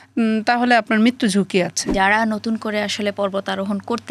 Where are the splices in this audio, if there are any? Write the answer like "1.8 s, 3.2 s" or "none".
1.8 s